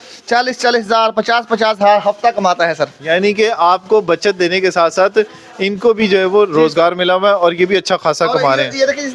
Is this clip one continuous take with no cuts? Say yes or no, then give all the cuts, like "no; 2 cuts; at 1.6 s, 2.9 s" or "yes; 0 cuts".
yes; 0 cuts